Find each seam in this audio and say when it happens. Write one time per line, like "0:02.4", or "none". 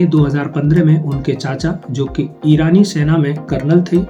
none